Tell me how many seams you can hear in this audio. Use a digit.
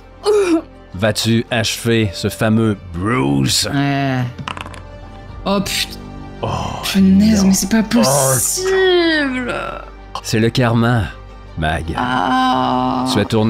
1